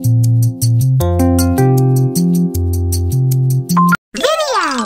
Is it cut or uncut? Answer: cut